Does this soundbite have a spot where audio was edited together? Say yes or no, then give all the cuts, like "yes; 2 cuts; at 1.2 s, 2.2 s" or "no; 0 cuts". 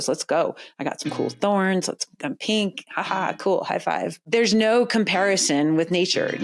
yes; 1 cut; at 4.2 s